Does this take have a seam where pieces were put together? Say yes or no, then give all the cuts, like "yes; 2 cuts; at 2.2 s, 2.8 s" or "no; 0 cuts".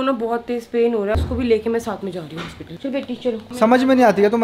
yes; 2 cuts; at 1.2 s, 3.5 s